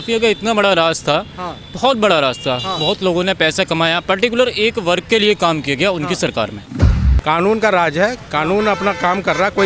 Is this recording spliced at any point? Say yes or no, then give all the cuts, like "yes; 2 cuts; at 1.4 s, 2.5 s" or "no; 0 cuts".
yes; 1 cut; at 7.0 s